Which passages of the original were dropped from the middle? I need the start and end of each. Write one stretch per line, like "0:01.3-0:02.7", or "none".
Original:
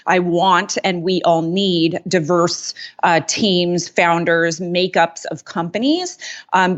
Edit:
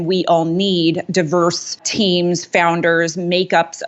0:02.8-0:03.3